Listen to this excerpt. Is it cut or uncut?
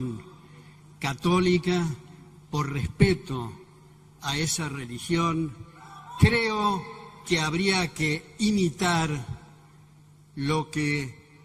uncut